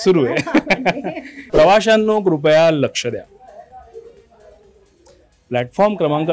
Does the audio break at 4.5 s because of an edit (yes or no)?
no